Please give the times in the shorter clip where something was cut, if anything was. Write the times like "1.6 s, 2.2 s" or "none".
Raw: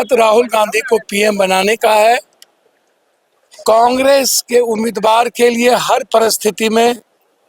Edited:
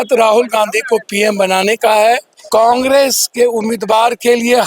2.3 s